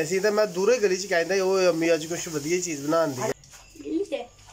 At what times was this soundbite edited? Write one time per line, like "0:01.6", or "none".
0:03.3